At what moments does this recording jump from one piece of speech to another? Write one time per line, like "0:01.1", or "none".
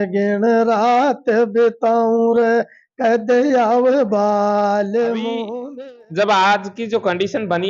0:05.5